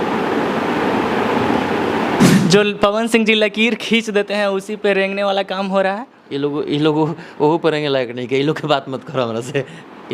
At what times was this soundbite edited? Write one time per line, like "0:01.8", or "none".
0:02.2